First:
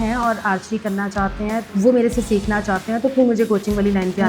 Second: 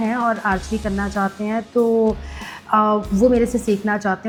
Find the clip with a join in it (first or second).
first